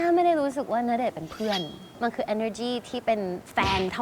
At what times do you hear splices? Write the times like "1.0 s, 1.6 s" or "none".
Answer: 1.9 s